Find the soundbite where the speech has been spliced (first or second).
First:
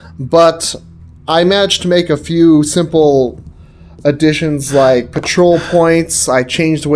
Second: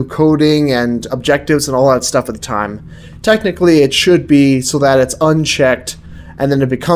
second